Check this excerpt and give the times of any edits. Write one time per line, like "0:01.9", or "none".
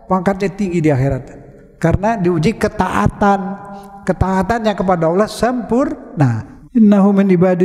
0:06.5